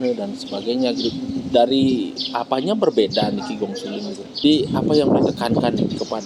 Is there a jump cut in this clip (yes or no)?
yes